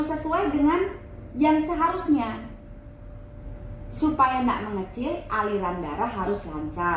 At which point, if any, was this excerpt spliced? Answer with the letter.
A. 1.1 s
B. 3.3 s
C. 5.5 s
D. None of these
D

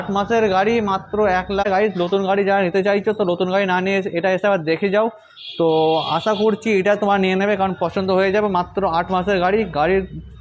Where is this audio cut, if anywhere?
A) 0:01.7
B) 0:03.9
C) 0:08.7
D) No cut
A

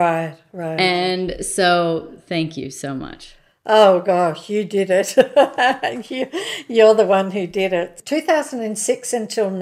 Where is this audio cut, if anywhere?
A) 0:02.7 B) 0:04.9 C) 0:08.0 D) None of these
C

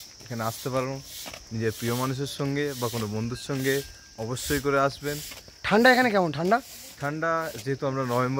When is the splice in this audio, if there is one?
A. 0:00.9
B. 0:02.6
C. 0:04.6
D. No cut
B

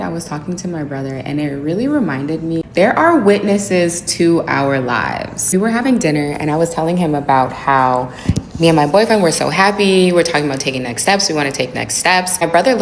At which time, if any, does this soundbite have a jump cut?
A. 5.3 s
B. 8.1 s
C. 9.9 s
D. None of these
D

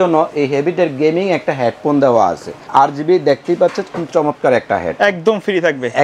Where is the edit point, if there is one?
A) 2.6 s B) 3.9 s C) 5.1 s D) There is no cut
A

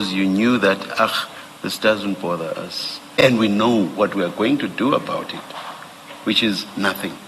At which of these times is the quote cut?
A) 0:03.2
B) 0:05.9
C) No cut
A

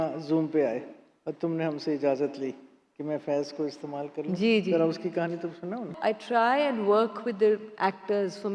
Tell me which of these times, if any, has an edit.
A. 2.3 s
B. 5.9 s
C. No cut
B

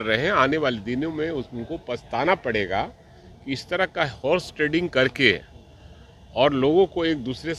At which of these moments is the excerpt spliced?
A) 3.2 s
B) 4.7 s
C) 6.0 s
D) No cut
D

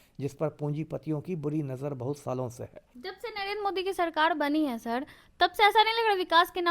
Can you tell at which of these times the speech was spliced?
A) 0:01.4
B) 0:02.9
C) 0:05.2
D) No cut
B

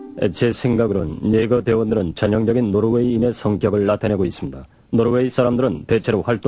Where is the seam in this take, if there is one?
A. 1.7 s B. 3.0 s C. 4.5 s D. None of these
B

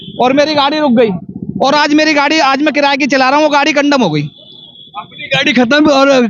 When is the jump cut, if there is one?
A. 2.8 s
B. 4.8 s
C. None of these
C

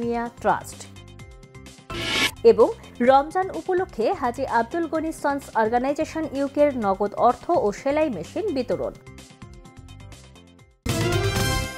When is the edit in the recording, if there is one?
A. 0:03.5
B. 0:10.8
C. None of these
B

